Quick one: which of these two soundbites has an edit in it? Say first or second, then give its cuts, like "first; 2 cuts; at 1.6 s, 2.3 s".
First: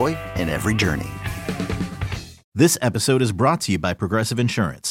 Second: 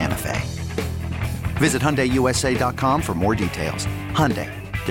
first; 1 cut; at 2.5 s